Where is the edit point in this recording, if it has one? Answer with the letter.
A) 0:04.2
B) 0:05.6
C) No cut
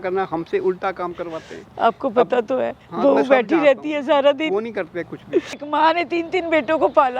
B